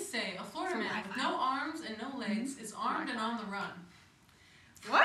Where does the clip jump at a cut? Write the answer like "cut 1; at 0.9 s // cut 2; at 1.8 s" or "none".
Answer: none